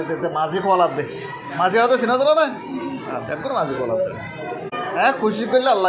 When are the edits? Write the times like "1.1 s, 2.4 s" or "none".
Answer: 4.7 s